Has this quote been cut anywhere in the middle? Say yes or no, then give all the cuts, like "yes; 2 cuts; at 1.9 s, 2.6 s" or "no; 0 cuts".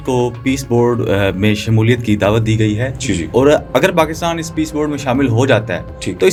no; 0 cuts